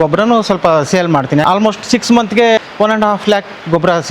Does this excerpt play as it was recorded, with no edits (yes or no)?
no